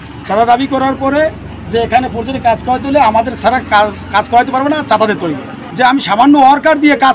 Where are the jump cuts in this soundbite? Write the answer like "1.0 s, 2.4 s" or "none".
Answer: none

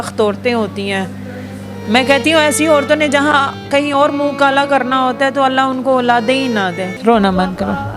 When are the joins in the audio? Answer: 6.9 s

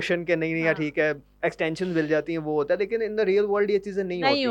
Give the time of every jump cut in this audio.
none

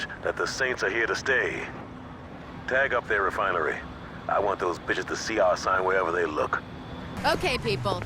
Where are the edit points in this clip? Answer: 7.1 s

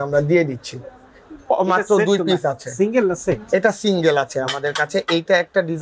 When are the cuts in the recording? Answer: none

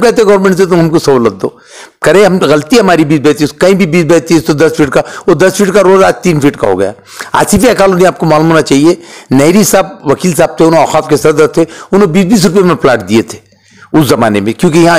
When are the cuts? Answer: none

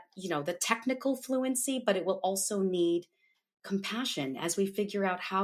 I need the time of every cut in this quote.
none

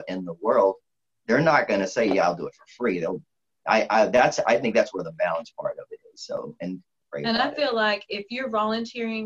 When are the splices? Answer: 3.4 s, 7.0 s

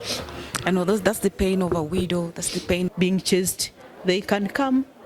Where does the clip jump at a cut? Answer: 2.9 s

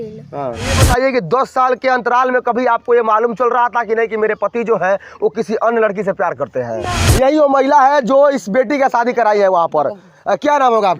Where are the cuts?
0.8 s, 6.9 s

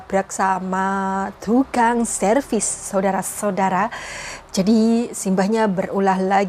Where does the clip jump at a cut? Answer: none

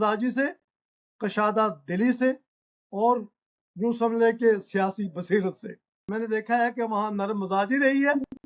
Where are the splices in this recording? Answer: 6.1 s

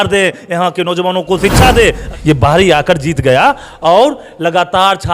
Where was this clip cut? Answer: 2.1 s

